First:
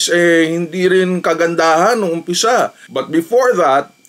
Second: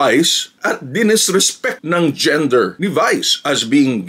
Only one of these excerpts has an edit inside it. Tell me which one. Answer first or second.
first